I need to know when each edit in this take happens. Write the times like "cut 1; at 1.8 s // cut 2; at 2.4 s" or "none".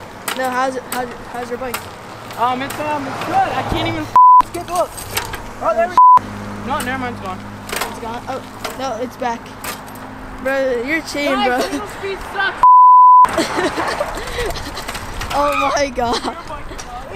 none